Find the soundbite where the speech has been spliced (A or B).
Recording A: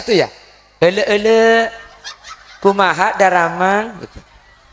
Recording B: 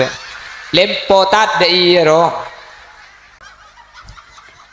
B